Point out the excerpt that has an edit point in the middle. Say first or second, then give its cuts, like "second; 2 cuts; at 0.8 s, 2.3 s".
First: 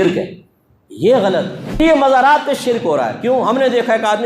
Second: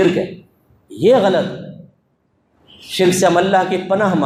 first; 1 cut; at 1.6 s